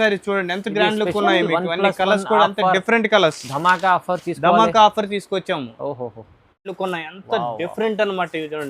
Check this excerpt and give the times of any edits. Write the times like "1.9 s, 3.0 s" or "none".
6.7 s